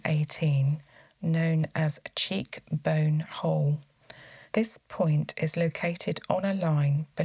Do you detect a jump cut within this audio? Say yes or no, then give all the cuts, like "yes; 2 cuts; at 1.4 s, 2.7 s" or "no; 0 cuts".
no; 0 cuts